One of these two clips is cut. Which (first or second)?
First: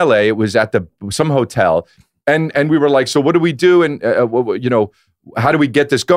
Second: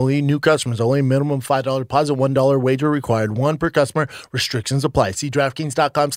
first